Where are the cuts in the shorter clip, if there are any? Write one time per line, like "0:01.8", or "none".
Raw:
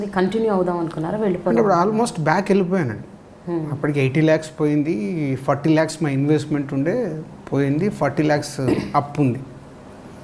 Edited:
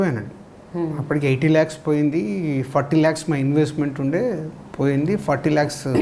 none